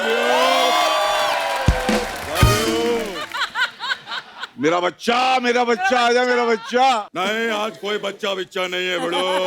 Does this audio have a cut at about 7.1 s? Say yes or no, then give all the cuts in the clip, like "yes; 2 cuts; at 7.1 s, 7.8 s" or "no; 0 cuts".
yes; 2 cuts; at 3.3 s, 7.1 s